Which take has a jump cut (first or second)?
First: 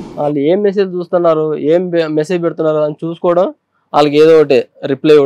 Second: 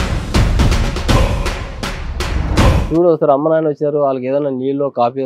second